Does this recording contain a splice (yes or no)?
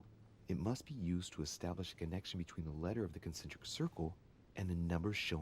no